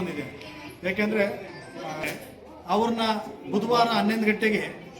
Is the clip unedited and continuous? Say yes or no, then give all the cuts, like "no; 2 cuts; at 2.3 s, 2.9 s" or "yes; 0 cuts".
no; 1 cut; at 2.1 s